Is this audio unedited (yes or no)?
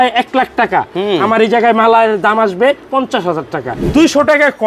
no